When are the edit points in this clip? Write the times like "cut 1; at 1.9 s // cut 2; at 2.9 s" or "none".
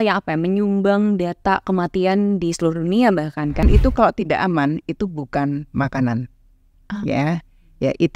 cut 1; at 3.6 s

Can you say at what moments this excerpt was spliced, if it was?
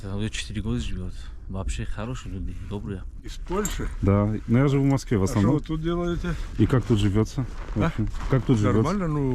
cut 1; at 3.1 s // cut 2; at 6.3 s

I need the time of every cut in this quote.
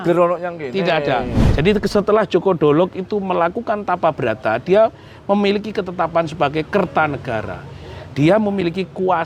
cut 1; at 1.4 s

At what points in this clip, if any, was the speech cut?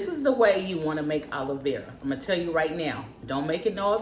none

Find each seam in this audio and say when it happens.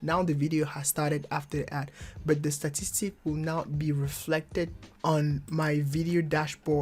cut 1; at 4.8 s

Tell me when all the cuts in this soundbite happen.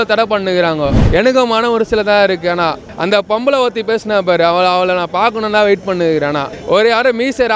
cut 1; at 1.0 s // cut 2; at 2.9 s // cut 3; at 6.5 s

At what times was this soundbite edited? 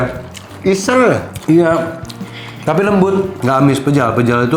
cut 1; at 3.4 s

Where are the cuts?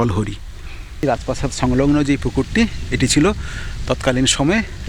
cut 1; at 1.0 s

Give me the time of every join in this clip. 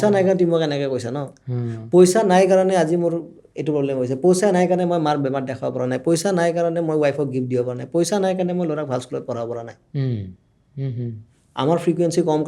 none

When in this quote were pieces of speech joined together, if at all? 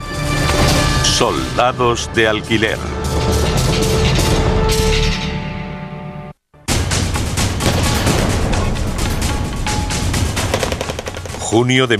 cut 1; at 5.2 s

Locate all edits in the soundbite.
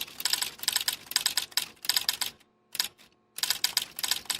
none

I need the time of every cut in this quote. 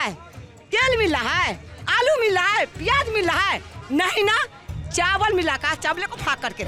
none

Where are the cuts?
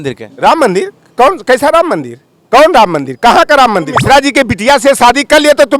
cut 1; at 3.9 s

